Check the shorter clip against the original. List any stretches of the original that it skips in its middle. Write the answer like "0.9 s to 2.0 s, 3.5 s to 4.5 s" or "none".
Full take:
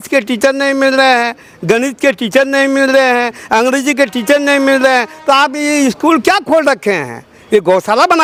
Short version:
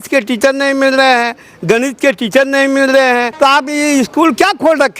3.3 s to 5.2 s